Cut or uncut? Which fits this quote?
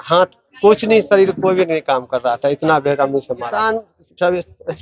cut